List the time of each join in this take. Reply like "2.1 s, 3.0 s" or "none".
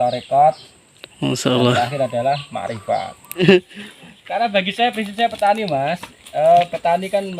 3.4 s